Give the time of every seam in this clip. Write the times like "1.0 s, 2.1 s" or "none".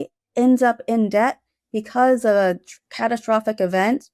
none

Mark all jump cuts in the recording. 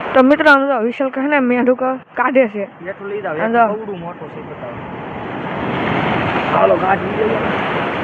none

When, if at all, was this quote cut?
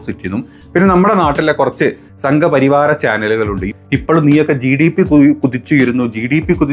3.7 s

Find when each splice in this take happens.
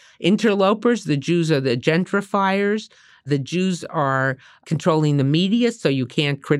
3.2 s, 4.6 s

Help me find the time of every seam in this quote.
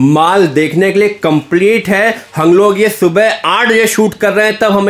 none

